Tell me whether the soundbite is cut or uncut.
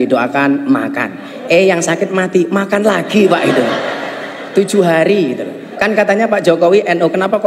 cut